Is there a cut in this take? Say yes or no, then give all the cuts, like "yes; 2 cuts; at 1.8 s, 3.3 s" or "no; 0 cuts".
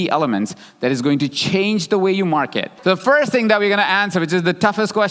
yes; 1 cut; at 2.6 s